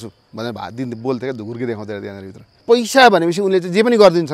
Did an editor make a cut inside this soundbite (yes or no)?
yes